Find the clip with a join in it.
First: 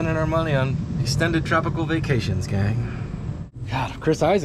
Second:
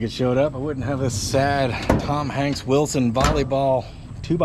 first; 2 cuts; at 0.9 s, 3.6 s

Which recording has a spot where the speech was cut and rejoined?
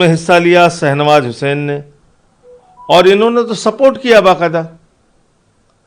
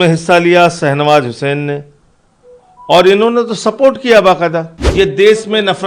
second; 1 cut; at 4.8 s

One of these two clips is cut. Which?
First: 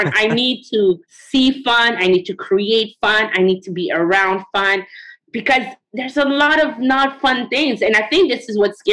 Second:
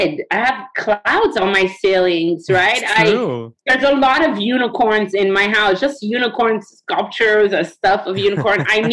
first; 1 cut; at 5.8 s

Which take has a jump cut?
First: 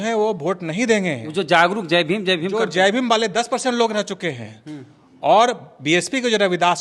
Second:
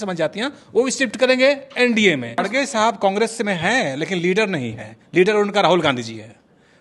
second; 1 cut; at 2.4 s

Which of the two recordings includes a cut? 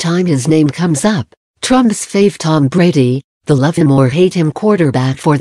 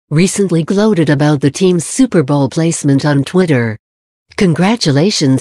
second; 1 cut; at 4.3 s

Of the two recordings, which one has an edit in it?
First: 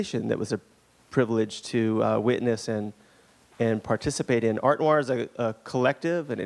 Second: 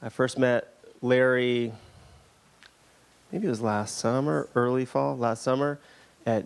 first; 1 cut; at 2.8 s

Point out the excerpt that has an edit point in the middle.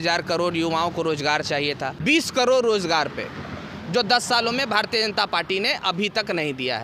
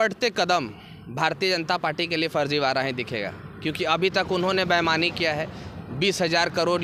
first; 1 cut; at 1.9 s

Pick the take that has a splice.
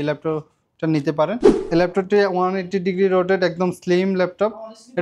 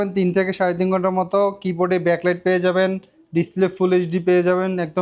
first; 1 cut; at 1.5 s

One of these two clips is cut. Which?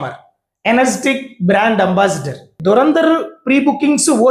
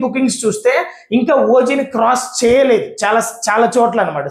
first; 1 cut; at 2.6 s

